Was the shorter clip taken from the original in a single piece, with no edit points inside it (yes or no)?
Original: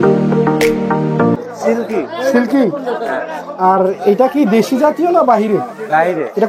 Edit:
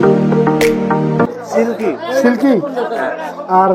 no